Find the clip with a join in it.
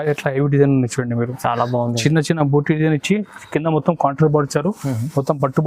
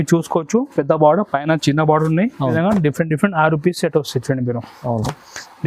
second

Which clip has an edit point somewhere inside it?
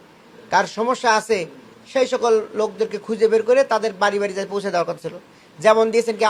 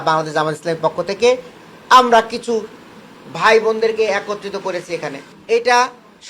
second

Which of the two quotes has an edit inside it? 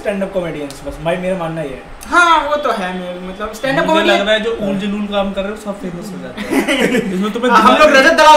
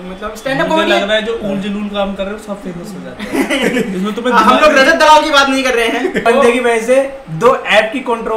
second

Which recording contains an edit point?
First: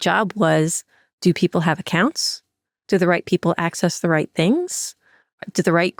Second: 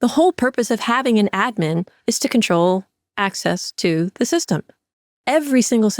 second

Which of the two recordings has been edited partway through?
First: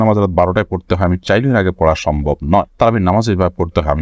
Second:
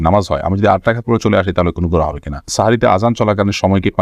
second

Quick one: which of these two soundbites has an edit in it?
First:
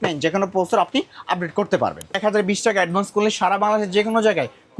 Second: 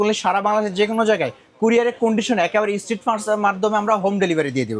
first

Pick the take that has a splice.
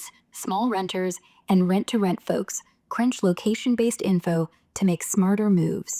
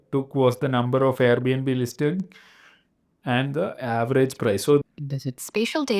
second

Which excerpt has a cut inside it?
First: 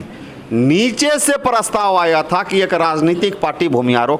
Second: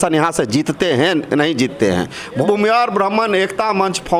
second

